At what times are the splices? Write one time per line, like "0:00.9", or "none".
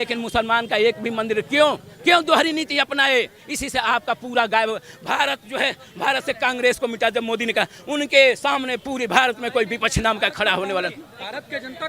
none